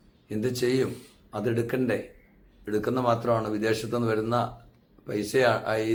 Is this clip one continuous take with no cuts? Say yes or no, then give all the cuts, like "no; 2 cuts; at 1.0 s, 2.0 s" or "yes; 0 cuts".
yes; 0 cuts